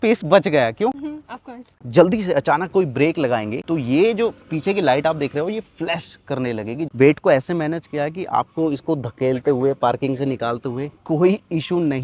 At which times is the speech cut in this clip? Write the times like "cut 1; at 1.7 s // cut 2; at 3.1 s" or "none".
cut 1; at 1.8 s // cut 2; at 6.9 s